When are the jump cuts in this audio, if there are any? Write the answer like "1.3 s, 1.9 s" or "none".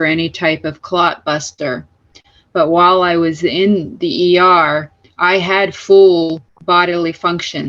6.5 s